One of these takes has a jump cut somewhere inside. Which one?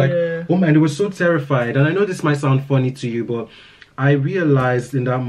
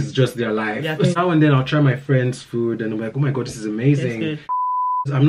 second; 2 cuts; at 1.0 s, 4.6 s

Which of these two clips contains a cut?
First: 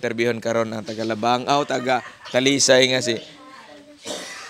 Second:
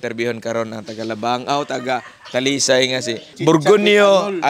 second; 1 cut; at 3.3 s

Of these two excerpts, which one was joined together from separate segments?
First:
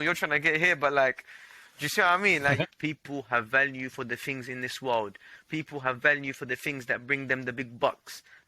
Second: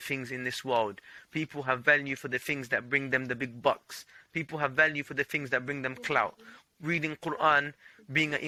first; 1 cut; at 2.6 s

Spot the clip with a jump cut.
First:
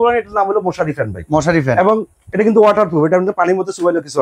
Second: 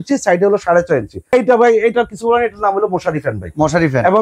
second; 1 cut; at 1.3 s

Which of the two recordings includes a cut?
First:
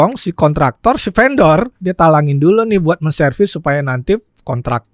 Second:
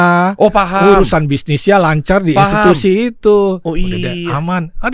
first; 1 cut; at 1.8 s

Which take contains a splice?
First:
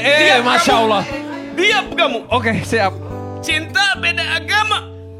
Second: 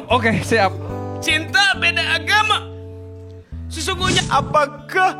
second; 1 cut; at 4.2 s

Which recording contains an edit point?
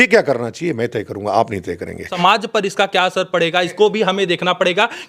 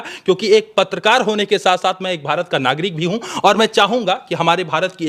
first; 2 cuts; at 2.2 s, 3.7 s

